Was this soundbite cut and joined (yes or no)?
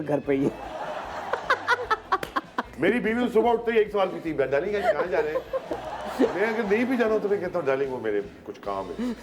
yes